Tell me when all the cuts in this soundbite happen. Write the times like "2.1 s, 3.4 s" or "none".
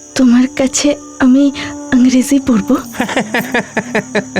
2.9 s